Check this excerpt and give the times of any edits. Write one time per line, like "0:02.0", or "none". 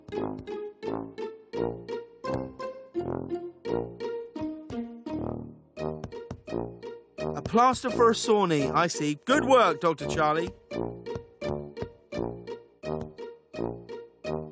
0:07.6